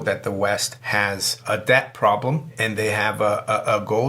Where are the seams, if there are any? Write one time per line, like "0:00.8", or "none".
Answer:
0:01.0
0:02.5